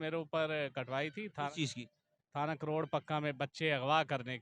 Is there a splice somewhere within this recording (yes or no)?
no